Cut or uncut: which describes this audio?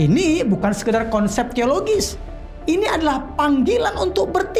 uncut